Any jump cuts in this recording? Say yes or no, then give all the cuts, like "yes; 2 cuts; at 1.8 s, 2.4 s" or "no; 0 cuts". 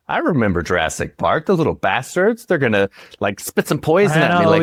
no; 0 cuts